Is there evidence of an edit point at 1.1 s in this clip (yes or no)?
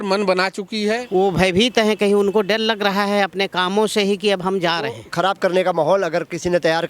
yes